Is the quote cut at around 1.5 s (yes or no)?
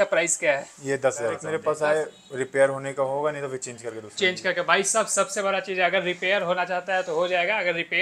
yes